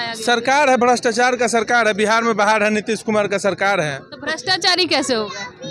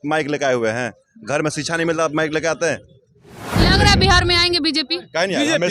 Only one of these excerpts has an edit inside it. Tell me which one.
second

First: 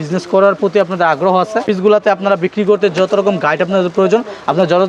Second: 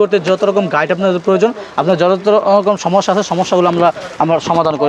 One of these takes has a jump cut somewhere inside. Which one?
first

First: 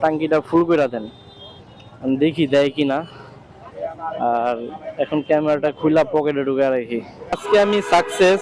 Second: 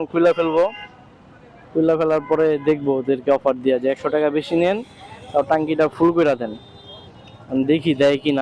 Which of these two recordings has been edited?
first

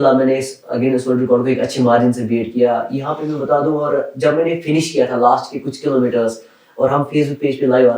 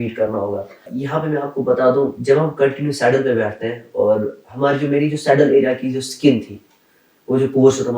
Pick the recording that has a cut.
second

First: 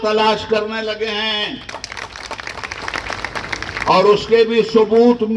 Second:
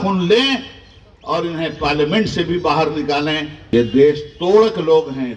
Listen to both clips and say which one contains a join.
second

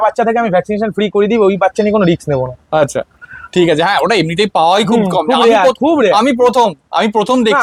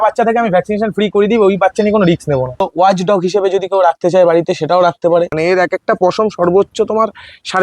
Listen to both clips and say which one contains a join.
second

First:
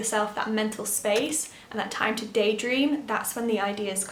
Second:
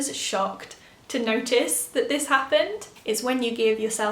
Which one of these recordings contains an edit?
second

